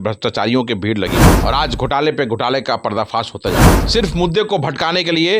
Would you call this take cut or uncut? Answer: cut